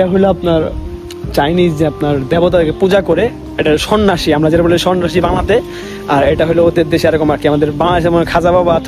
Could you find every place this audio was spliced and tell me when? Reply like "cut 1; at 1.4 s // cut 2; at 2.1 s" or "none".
none